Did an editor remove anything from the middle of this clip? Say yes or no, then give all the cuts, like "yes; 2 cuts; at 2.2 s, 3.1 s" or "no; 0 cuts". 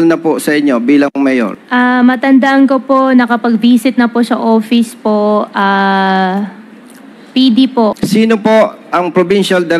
yes; 2 cuts; at 1.6 s, 8.0 s